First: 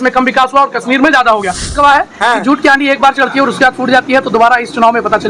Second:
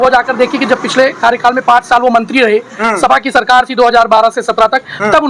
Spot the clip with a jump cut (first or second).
first